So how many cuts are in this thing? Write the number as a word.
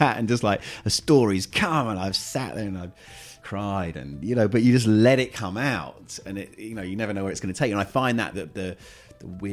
two